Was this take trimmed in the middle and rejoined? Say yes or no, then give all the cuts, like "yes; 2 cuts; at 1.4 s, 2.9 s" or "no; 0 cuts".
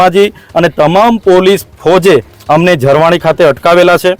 no; 0 cuts